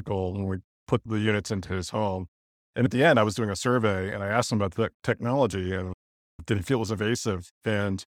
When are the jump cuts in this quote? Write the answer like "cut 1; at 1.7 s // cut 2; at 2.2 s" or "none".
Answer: cut 1; at 2.9 s